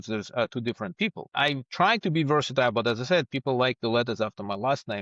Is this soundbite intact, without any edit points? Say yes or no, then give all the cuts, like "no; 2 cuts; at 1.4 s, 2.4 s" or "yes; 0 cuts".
no; 1 cut; at 1.3 s